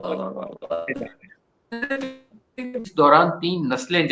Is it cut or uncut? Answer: cut